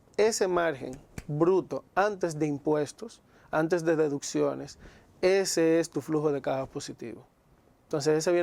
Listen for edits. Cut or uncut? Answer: uncut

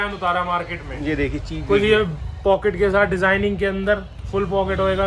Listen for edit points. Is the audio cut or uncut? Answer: uncut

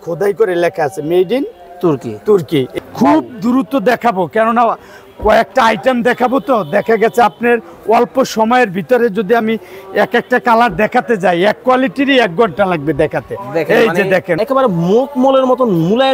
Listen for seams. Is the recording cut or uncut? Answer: cut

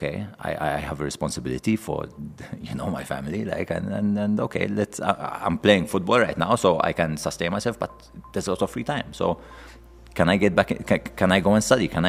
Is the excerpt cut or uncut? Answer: uncut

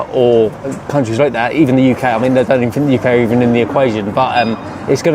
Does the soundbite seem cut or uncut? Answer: uncut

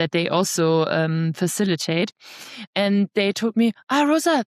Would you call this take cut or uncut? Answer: uncut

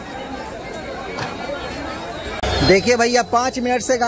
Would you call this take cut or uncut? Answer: cut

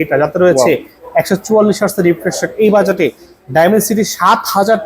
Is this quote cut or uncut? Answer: uncut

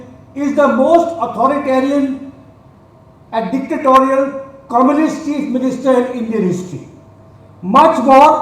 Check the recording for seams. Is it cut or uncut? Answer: uncut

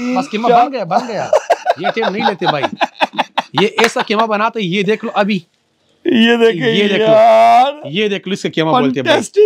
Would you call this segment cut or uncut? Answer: uncut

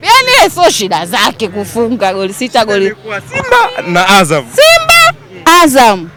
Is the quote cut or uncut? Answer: uncut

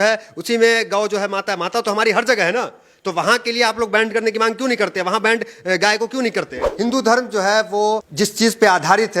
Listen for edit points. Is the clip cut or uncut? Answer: cut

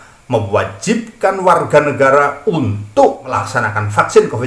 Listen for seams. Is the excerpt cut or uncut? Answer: cut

